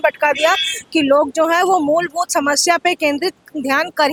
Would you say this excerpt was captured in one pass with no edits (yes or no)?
yes